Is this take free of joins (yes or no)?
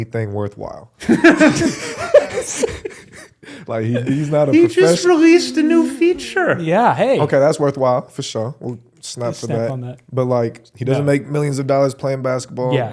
yes